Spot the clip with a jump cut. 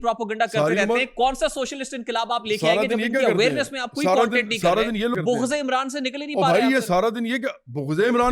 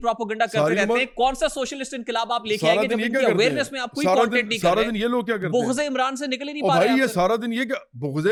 first; 1 cut; at 5.1 s

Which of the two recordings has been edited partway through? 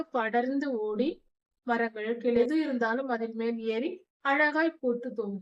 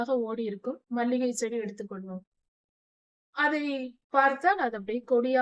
first; 1 cut; at 2.4 s

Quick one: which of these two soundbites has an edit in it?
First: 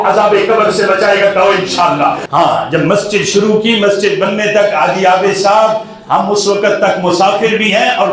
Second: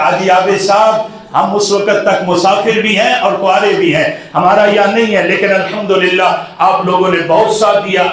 first; 1 cut; at 2.2 s

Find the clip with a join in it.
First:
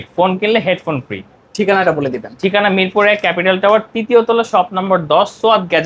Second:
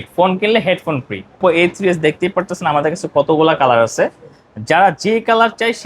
second; 1 cut; at 1.4 s

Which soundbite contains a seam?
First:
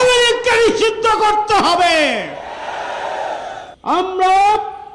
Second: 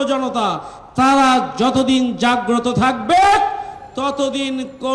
first; 1 cut; at 3.8 s

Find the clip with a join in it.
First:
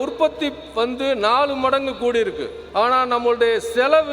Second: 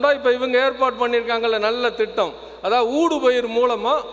first; 1 cut; at 2.5 s

